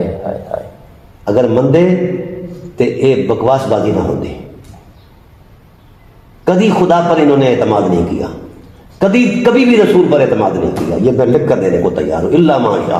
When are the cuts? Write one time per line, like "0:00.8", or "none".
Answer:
none